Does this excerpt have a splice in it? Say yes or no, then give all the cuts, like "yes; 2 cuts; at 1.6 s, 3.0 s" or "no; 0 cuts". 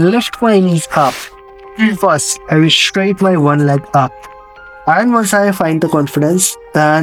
no; 0 cuts